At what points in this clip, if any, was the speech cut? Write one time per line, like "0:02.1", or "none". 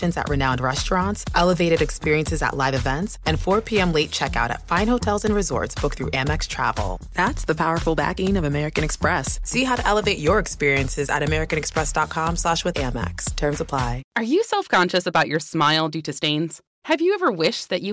0:14.0